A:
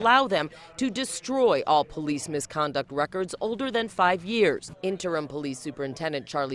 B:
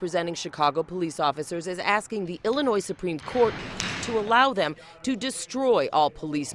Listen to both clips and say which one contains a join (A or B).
A